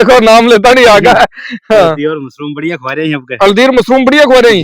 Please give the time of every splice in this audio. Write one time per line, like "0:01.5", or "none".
none